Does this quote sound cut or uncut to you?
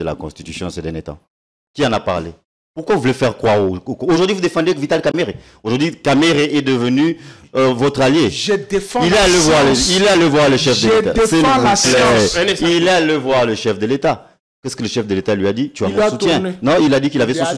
uncut